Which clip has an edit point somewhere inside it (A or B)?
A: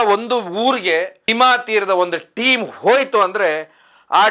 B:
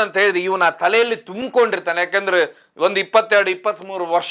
A